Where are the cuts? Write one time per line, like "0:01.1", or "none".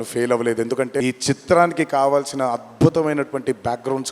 0:01.0